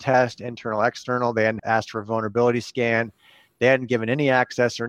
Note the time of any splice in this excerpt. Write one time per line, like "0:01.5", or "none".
0:01.6